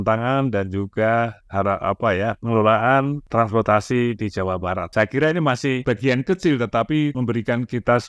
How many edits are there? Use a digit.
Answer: 4